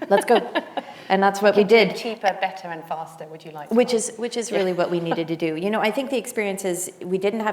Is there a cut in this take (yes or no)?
no